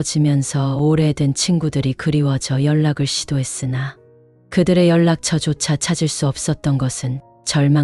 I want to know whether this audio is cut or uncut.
uncut